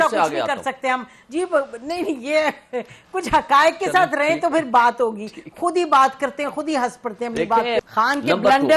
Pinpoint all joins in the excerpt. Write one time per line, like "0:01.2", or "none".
0:07.8

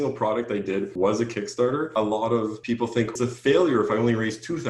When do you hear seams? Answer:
0:00.9
0:01.9
0:03.1

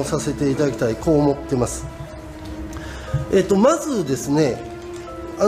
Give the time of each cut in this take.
0:01.0

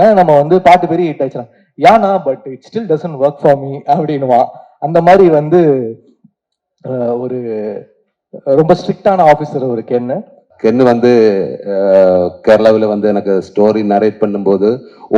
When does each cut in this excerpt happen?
0:10.5

